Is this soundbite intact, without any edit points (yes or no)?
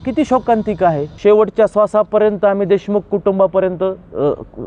no